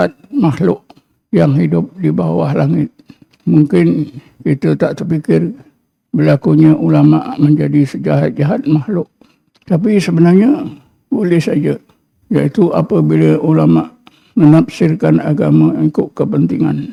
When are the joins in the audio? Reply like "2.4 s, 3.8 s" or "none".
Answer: none